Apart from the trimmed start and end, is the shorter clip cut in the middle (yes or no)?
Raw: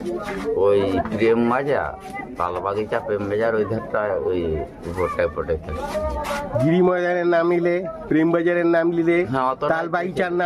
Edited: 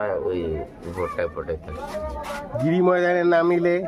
no